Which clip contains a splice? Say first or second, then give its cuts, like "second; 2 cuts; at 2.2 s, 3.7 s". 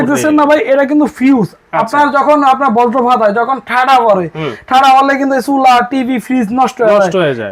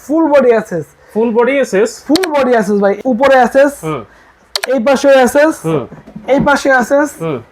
second; 1 cut; at 3.0 s